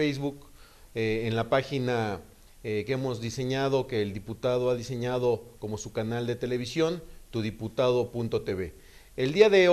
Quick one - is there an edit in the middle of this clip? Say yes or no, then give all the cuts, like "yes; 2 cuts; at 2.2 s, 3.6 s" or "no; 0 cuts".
yes; 1 cut; at 8.4 s